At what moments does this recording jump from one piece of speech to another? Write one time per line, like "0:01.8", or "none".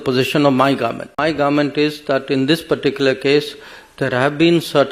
0:01.2

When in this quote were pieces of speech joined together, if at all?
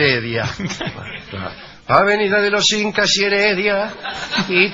0:02.9

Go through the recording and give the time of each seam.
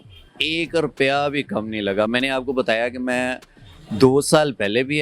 none

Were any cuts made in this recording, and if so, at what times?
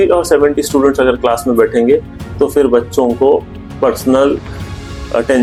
none

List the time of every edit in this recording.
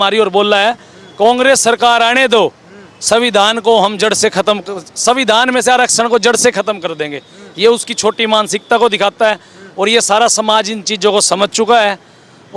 none

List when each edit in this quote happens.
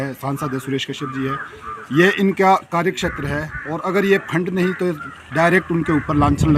none

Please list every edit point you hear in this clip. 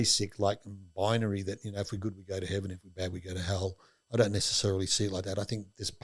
none

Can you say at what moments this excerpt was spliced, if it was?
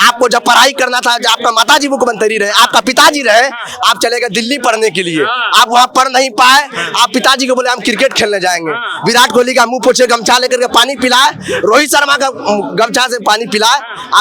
none

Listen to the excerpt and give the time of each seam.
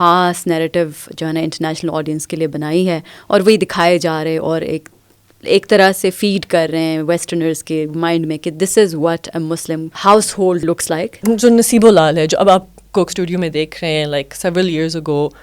0:09.9
0:11.1

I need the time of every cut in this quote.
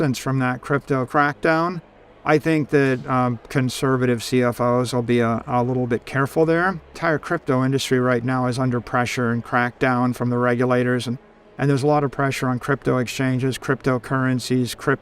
0:07.0

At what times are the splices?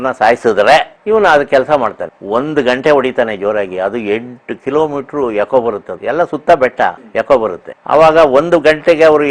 0:02.1
0:05.9
0:07.0
0:07.7

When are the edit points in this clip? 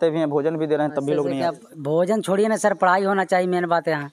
none

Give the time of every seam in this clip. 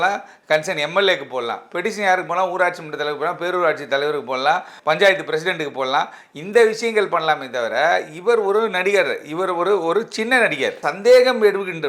0:04.7
0:10.8

